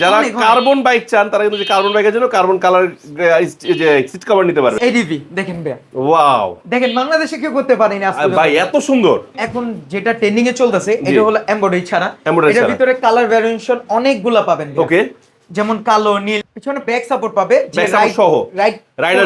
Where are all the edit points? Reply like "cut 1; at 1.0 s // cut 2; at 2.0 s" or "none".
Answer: cut 1; at 4.8 s // cut 2; at 9.4 s // cut 3; at 16.4 s